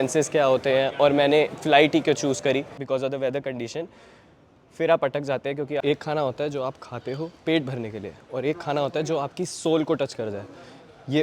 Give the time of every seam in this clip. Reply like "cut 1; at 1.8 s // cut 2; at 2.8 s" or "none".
cut 1; at 2.7 s // cut 2; at 5.8 s